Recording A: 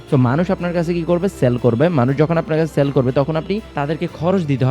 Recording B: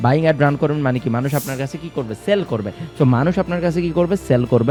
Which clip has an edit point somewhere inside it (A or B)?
A